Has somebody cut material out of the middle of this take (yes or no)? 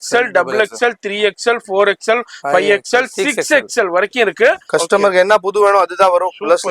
yes